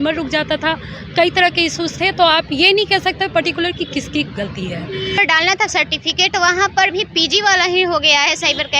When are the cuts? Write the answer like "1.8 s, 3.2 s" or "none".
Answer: 5.1 s